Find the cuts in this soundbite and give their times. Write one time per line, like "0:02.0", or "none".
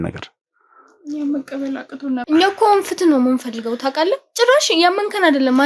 0:02.2